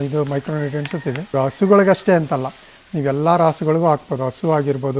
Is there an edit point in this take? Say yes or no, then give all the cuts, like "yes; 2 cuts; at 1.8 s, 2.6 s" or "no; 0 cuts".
yes; 1 cut; at 1.3 s